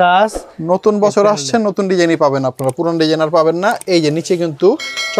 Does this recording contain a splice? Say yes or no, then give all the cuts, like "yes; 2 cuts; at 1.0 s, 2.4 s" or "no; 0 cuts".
no; 0 cuts